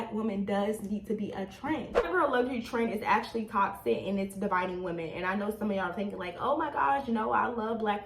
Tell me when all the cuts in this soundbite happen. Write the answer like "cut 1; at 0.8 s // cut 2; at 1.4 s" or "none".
cut 1; at 2.1 s